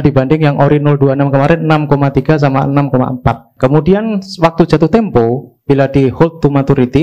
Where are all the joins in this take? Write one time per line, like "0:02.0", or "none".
0:03.5